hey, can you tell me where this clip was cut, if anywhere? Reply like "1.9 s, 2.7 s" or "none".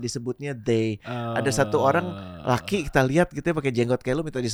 none